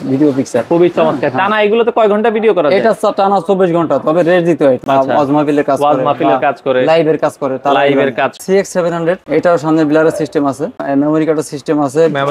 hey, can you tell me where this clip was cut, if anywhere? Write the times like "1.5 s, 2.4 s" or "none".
4.8 s, 8.4 s, 9.2 s, 10.8 s